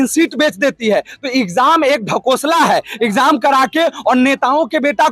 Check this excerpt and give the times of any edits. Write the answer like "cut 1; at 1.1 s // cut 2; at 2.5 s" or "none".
none